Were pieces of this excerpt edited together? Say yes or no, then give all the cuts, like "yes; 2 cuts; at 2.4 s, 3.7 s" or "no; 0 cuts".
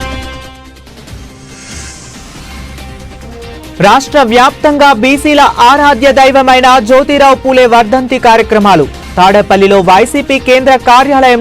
no; 0 cuts